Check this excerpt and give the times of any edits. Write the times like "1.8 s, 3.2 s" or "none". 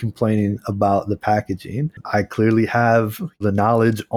1.9 s, 3.4 s